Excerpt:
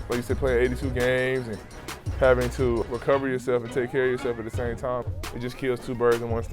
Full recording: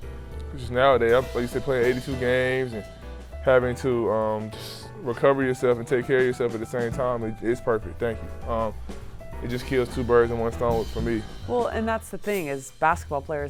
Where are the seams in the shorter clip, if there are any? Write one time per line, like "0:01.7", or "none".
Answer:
0:02.8
0:05.0